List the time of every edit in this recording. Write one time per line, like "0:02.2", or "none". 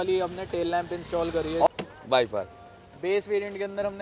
0:01.7